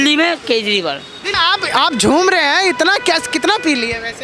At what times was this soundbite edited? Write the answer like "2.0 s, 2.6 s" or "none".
1.2 s